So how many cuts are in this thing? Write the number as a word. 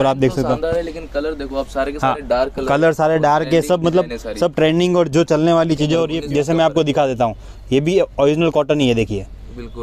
one